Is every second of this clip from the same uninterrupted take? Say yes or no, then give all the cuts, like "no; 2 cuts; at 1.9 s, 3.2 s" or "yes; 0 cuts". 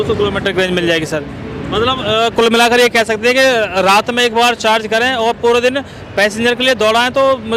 yes; 0 cuts